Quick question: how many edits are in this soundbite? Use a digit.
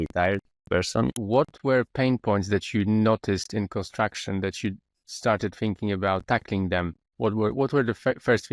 1